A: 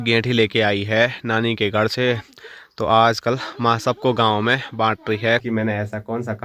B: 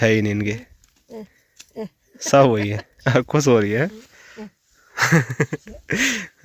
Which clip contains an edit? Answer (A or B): A